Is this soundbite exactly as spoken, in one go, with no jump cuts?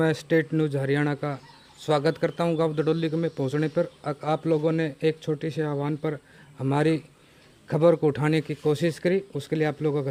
yes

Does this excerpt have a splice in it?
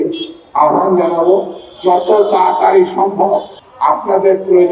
yes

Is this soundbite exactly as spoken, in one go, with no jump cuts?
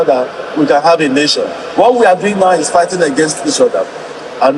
yes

